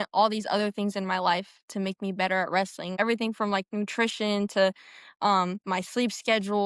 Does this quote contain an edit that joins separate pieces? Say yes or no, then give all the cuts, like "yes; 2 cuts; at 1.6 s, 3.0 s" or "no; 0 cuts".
yes; 1 cut; at 2.9 s